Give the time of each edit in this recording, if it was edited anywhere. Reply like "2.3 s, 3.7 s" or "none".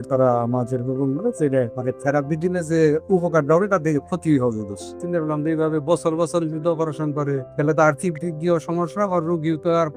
1.7 s, 5.0 s, 7.5 s